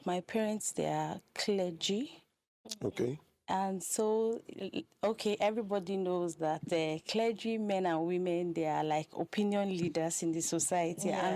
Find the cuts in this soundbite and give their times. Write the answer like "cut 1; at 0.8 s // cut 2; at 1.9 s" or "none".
none